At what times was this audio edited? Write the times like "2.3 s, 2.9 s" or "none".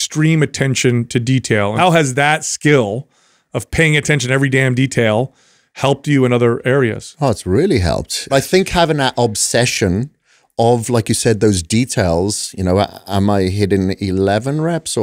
1.7 s, 8.2 s